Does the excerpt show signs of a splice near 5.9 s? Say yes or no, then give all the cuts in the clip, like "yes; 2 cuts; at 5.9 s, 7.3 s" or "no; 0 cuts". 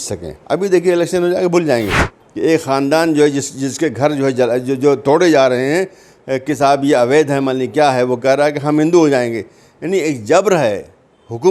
no; 1 cut; at 2.1 s